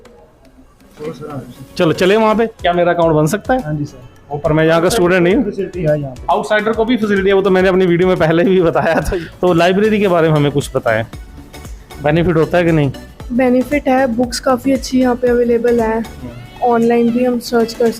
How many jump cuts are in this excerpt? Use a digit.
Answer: 2